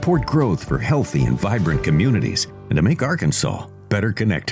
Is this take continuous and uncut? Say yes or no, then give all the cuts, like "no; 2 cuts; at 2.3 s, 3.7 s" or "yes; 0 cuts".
yes; 0 cuts